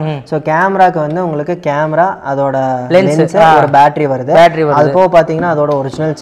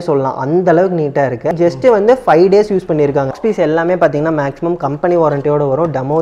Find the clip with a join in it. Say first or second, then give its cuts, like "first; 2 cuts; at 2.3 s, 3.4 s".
second; 2 cuts; at 1.5 s, 3.4 s